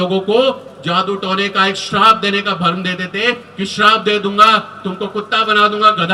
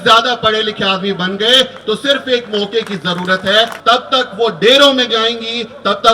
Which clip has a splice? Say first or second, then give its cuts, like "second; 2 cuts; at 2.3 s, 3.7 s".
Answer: second; 1 cut; at 3.8 s